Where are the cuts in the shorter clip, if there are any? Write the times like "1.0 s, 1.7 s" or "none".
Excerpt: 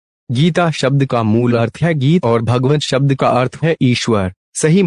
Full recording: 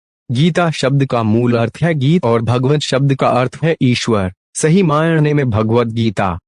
none